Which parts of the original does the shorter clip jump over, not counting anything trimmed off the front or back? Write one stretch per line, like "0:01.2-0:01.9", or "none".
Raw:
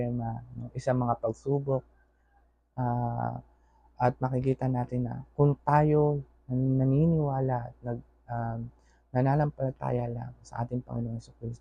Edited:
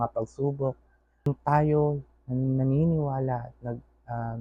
0:02.3-0:05.5